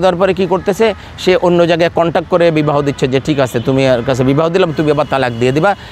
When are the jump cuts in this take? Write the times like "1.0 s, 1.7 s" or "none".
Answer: none